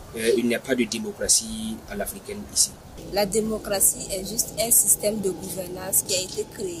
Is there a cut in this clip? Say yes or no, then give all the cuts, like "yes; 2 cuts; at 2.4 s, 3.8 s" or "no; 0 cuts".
yes; 1 cut; at 2.9 s